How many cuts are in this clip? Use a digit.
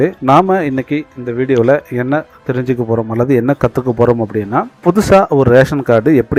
0